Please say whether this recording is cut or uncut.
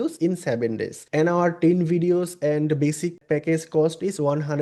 cut